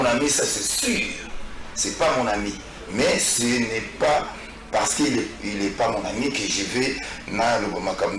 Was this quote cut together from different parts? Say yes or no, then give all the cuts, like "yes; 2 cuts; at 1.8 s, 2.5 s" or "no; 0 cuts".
no; 0 cuts